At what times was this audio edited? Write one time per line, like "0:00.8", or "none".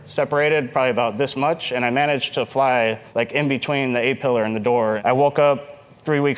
0:03.0
0:05.0